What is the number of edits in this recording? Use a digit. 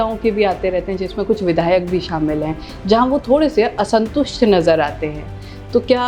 0